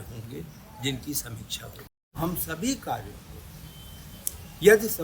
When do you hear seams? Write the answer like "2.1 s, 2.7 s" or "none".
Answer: 2.0 s